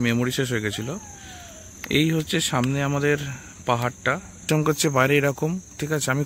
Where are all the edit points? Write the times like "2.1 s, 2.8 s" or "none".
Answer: 4.5 s